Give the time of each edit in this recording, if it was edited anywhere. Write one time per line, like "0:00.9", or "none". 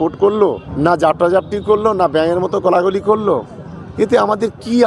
none